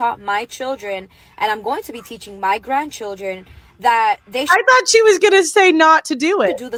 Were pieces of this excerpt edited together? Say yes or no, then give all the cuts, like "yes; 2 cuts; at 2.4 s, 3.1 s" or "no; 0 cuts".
no; 0 cuts